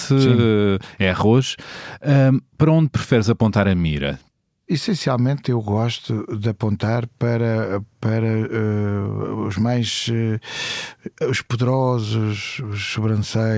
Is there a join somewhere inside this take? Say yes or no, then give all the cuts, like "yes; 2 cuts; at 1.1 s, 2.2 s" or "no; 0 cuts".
yes; 1 cut; at 4.4 s